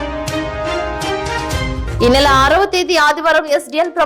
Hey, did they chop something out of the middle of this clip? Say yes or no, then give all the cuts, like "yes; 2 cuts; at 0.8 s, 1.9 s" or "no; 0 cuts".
yes; 1 cut; at 1.8 s